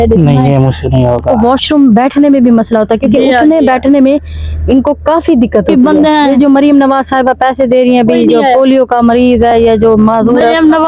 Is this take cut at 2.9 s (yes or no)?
no